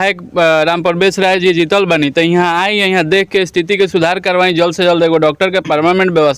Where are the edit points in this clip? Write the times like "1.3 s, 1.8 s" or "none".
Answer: none